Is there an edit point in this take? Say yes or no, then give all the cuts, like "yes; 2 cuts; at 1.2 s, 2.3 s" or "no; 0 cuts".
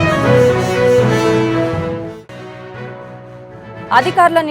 yes; 1 cut; at 2.6 s